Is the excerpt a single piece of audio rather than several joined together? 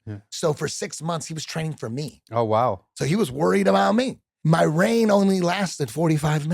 no; 1 cut; at 4.3 s

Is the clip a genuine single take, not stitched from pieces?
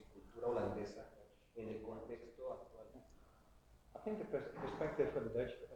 no; 1 cut; at 2.7 s

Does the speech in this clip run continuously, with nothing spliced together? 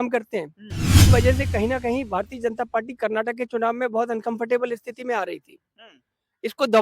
no; 1 cut; at 1.0 s

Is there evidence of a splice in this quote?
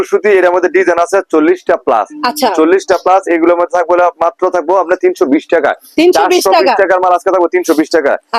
no; 0 cuts

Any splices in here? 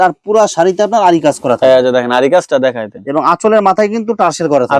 no; 0 cuts

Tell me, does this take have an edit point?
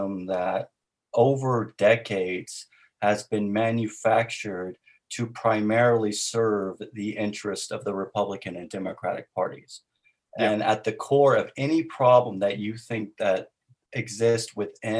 no; 0 cuts

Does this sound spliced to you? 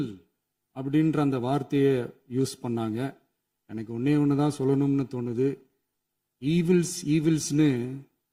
no; 0 cuts

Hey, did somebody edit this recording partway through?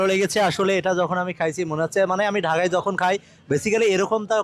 no; 0 cuts

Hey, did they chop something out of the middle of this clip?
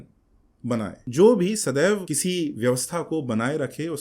yes; 2 cuts; at 1.0 s, 2.1 s

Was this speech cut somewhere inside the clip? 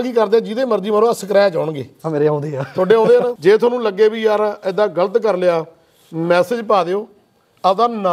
yes; 1 cut; at 3.3 s

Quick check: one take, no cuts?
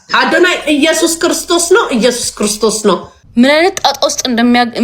no; 1 cut; at 3.2 s

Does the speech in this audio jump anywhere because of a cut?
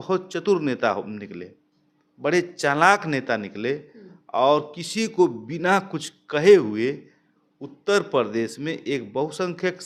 no; 0 cuts

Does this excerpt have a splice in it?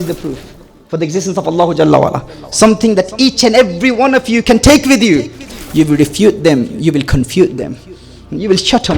yes; 1 cut; at 5.5 s

